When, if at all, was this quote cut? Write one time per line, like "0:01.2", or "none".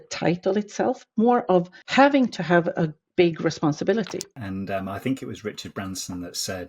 0:04.2